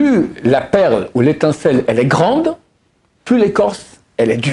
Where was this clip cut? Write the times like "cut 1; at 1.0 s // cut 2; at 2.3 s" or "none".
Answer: none